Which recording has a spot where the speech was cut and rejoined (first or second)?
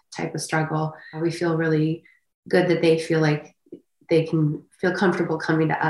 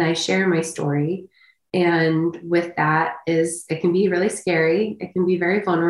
first